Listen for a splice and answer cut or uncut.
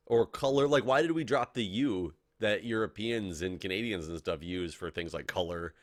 uncut